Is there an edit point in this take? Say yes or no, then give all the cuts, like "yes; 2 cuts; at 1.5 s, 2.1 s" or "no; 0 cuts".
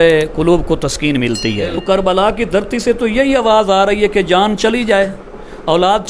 yes; 1 cut; at 1.8 s